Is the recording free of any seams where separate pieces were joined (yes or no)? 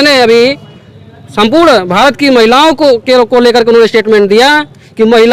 yes